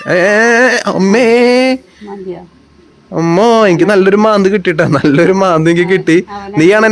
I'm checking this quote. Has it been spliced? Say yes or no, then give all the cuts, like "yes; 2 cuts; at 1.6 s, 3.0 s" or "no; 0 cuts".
no; 0 cuts